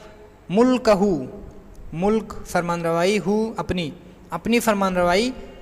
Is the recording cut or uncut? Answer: uncut